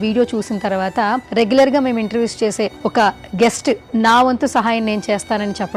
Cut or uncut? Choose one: cut